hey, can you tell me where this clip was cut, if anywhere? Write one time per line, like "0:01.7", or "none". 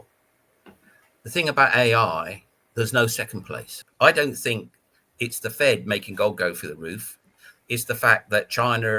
0:03.8